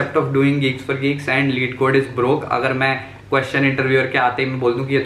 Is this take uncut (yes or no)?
yes